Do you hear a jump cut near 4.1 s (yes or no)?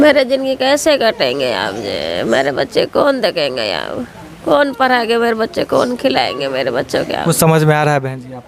no